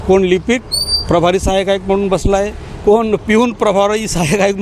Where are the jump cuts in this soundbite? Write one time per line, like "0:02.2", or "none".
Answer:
none

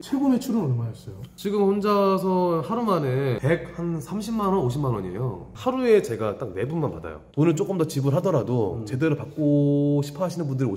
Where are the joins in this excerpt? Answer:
0:03.4
0:05.4
0:07.2

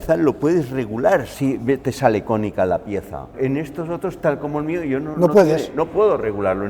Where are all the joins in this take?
0:01.3
0:03.3

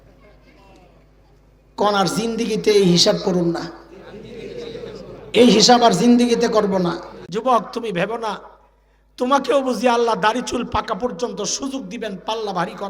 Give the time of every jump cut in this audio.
0:07.1

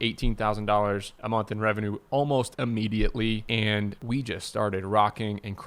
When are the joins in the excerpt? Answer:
0:04.0

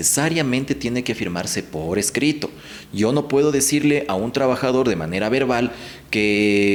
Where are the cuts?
none

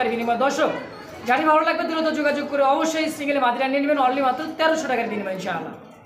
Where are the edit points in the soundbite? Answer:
none

